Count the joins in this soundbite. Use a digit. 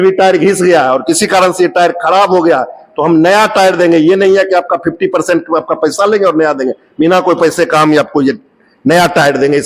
0